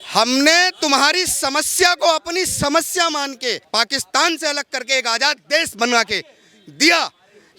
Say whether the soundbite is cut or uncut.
cut